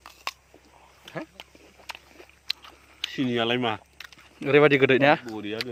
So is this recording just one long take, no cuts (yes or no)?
yes